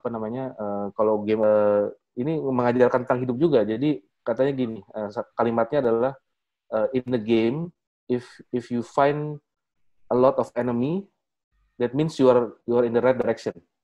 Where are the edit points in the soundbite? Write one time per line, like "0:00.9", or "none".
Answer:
0:01.4